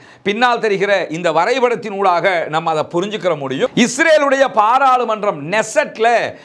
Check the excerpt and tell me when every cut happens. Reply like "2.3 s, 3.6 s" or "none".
3.7 s